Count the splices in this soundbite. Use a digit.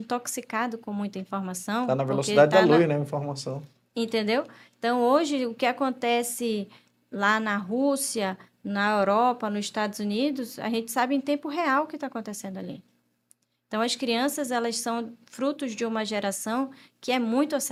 0